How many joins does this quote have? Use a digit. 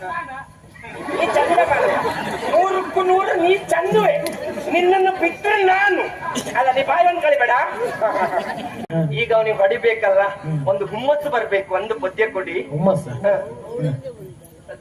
1